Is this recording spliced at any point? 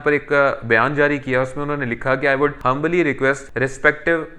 yes; 2 cuts; at 2.6 s, 3.5 s

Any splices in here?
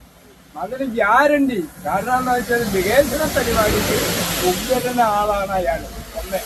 no; 0 cuts

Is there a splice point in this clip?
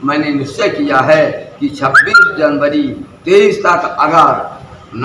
no; 0 cuts

